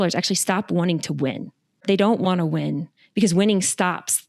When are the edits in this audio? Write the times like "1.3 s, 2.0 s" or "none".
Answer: 1.8 s